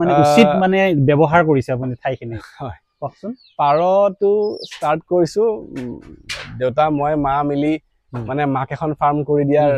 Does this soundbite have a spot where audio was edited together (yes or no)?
no